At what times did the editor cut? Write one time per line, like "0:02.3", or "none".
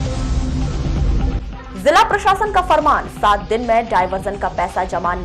0:01.2